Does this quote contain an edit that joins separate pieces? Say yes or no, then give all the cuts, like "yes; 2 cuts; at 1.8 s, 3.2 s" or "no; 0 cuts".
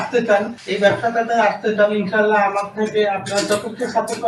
no; 0 cuts